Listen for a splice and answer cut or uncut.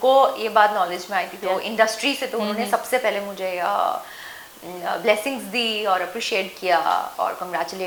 uncut